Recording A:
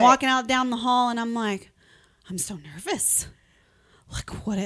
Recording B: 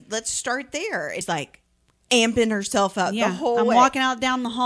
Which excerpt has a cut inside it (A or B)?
B